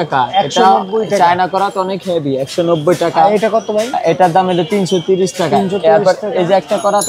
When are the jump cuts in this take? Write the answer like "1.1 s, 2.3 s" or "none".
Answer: none